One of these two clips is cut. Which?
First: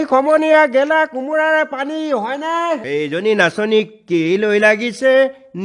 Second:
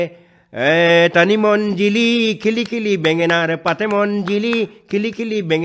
first; 1 cut; at 2.8 s

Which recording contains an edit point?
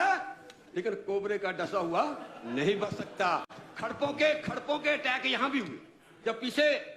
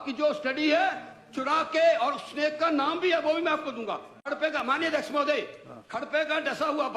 second; 1 cut; at 4.1 s

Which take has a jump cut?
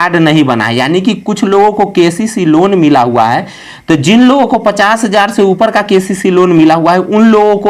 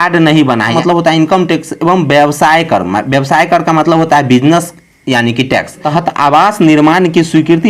second; 2 cuts; at 0.8 s, 5.8 s

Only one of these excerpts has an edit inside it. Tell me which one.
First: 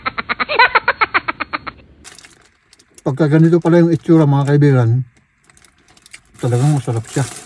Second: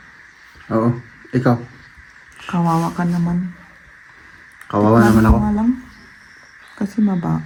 first; 1 cut; at 1.9 s

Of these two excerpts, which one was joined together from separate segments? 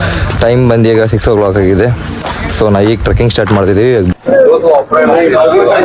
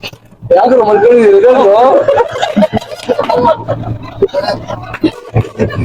first; 1 cut; at 4.1 s

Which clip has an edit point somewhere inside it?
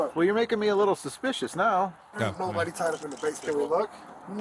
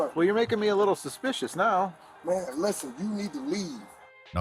first; 1 cut; at 2.1 s

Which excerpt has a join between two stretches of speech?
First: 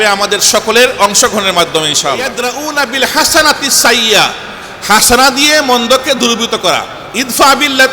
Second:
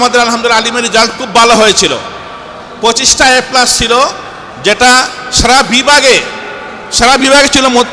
first; 1 cut; at 2.3 s

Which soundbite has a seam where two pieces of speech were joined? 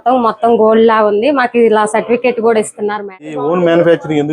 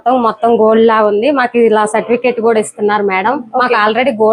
first; 1 cut; at 3.4 s

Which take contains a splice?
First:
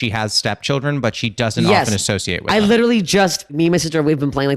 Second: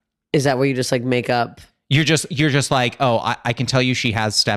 first; 1 cut; at 3.5 s

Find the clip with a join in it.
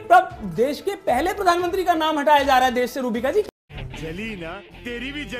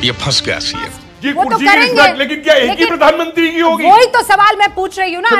second; 1 cut; at 1.0 s

